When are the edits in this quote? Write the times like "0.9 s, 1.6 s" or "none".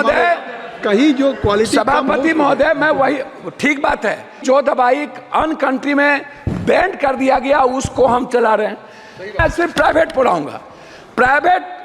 4.4 s, 9.4 s